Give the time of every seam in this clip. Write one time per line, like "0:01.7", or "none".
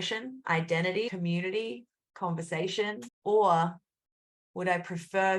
0:01.1
0:03.1